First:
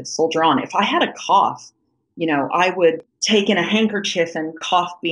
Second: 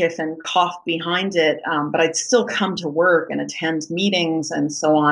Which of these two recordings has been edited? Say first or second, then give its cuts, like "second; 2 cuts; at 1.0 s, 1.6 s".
first; 1 cut; at 3.0 s